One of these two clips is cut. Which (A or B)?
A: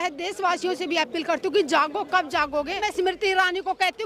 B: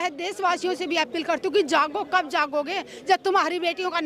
A